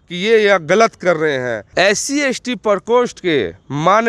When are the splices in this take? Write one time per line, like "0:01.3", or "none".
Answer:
0:01.6